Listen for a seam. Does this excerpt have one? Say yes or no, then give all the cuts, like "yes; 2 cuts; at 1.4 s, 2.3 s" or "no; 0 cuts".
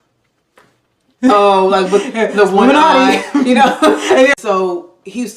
yes; 1 cut; at 4.3 s